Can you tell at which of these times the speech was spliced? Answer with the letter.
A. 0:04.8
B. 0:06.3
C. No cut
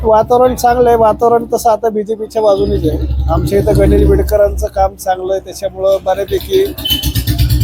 C